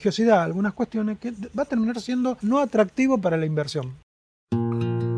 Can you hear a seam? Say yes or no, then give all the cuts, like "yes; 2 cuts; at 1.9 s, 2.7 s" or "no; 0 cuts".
yes; 2 cuts; at 2.4 s, 3.9 s